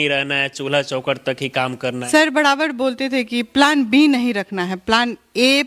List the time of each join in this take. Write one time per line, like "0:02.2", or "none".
0:02.0